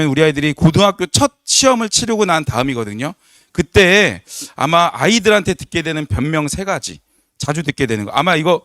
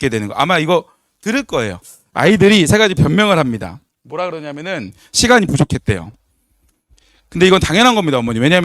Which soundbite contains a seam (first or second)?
second